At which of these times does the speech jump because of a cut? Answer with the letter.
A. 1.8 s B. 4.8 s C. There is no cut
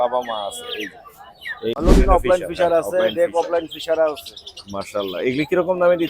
A